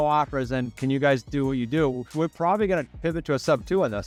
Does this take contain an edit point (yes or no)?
no